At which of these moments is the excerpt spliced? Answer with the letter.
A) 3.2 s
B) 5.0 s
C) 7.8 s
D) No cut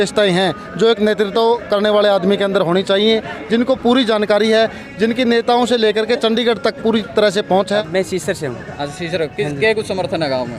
C